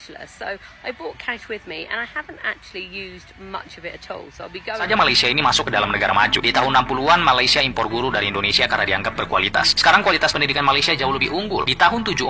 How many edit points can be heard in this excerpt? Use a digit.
1